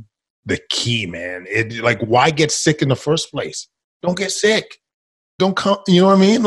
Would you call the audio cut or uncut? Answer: cut